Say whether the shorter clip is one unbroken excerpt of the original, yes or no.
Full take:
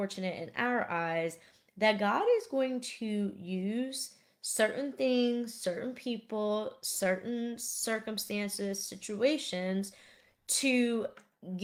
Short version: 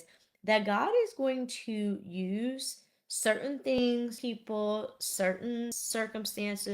no